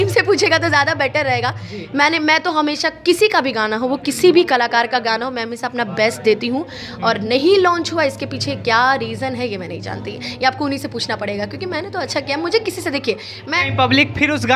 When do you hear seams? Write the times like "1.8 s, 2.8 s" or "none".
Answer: 13.6 s